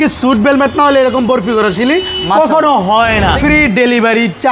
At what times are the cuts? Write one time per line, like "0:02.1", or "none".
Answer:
0:03.4